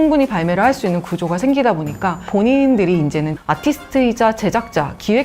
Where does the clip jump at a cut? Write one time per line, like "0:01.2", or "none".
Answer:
0:02.2